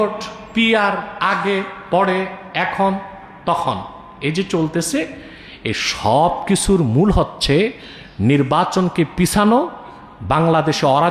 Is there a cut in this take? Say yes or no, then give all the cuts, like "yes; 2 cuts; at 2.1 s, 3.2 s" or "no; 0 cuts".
no; 0 cuts